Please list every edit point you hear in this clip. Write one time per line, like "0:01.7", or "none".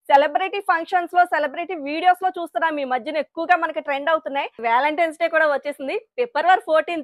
0:04.6